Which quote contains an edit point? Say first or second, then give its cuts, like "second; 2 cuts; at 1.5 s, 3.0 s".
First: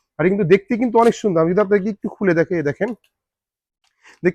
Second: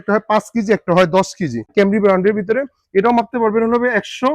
second; 1 cut; at 1.7 s